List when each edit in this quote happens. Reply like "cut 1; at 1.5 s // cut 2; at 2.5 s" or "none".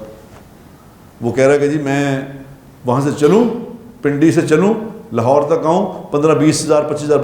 none

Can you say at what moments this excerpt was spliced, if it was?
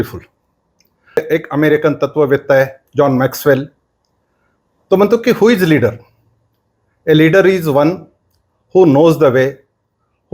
cut 1; at 1.2 s

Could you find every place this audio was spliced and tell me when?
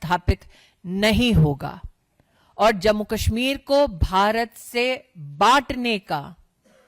none

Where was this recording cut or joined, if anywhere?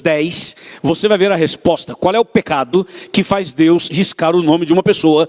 none

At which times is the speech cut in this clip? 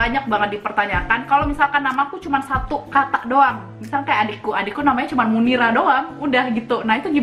none

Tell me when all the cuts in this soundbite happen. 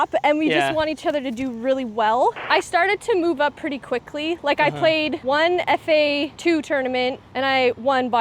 cut 1; at 2.4 s // cut 2; at 5.2 s // cut 3; at 6.3 s // cut 4; at 7.2 s

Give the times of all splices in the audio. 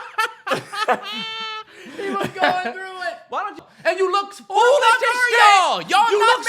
cut 1; at 3.6 s

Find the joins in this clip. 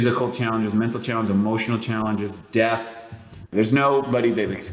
cut 1; at 3.4 s

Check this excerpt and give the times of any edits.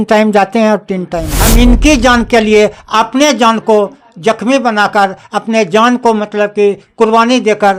cut 1; at 1.4 s

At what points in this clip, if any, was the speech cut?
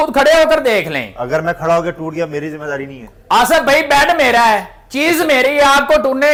none

